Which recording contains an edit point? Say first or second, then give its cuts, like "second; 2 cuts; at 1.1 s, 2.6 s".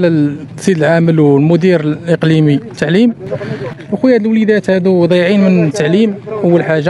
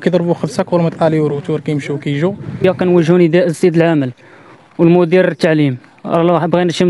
second; 1 cut; at 2.6 s